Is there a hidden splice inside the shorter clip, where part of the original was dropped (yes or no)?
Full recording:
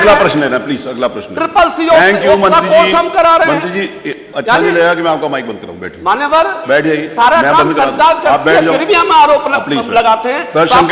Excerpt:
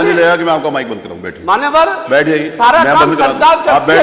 no